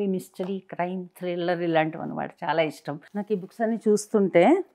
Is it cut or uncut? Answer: cut